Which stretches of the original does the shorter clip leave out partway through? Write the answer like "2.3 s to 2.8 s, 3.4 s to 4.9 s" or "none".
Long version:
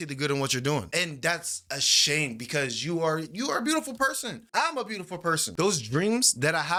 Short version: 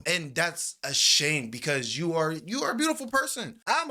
none